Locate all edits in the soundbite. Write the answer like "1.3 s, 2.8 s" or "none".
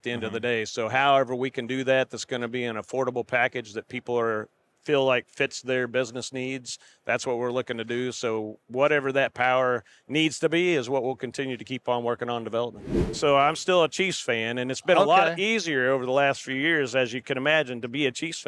13.1 s